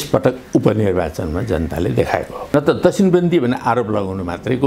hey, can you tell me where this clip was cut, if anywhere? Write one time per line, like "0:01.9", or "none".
0:02.5